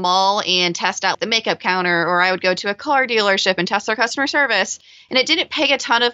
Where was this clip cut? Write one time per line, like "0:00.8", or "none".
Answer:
0:01.1